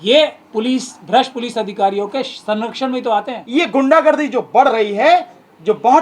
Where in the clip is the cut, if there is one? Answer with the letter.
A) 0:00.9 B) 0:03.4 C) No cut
B